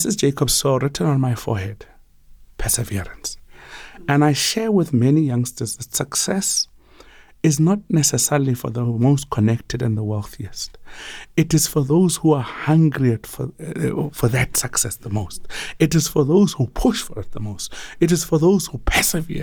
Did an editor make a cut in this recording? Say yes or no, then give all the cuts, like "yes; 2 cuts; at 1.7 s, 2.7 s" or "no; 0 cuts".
no; 0 cuts